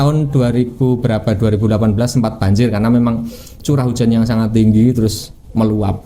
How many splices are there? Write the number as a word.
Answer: zero